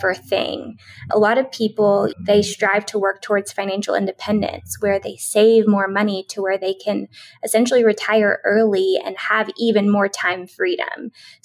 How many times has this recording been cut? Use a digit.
2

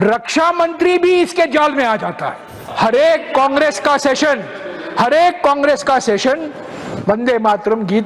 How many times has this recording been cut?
1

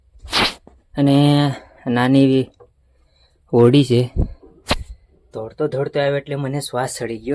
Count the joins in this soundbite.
0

